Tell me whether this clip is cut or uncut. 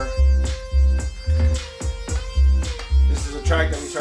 uncut